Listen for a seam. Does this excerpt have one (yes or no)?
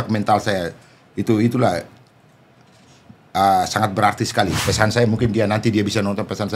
yes